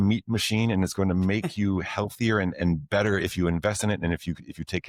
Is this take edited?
no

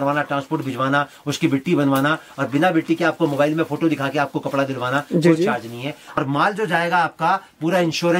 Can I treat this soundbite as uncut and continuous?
no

